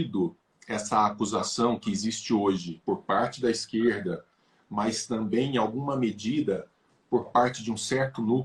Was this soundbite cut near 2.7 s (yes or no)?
yes